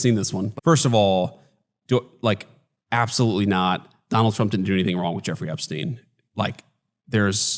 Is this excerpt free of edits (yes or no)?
no